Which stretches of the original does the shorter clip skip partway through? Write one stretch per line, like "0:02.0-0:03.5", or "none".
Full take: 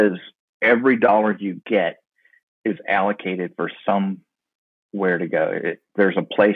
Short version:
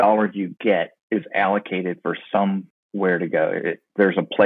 0:02.0-0:02.5
0:04.3-0:04.8